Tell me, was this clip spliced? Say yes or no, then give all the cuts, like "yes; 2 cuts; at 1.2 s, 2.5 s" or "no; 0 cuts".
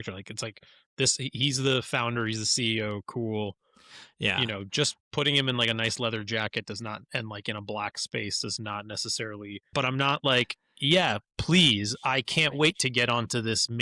yes; 1 cut; at 9.7 s